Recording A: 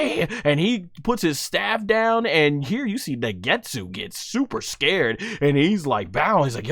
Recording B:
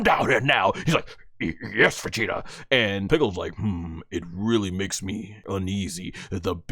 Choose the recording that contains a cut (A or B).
B